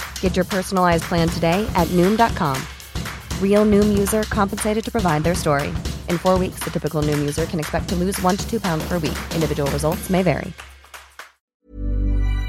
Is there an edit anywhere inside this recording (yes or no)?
yes